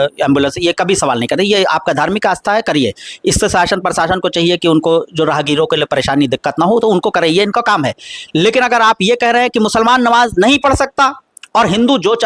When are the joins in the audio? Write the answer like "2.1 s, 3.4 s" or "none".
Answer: none